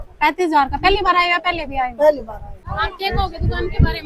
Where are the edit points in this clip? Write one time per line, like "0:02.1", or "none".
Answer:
0:02.7